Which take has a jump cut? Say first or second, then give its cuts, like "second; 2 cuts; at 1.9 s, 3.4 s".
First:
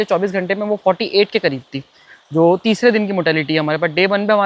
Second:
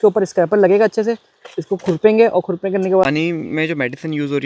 second; 1 cut; at 3.0 s